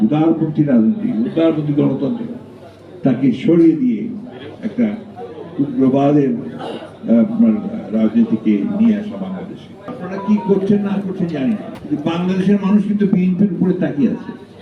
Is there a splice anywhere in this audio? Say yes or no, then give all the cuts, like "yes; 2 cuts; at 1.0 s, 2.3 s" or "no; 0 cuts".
yes; 1 cut; at 9.9 s